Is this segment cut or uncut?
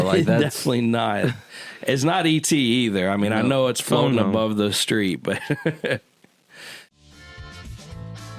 cut